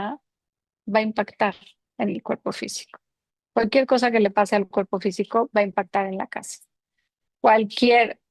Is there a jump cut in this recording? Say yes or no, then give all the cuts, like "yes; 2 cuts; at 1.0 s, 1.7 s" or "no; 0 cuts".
no; 0 cuts